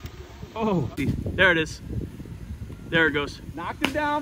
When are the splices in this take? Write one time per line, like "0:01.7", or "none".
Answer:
0:01.0